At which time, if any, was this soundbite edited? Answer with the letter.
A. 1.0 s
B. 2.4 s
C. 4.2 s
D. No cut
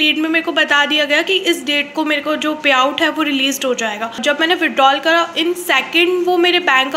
C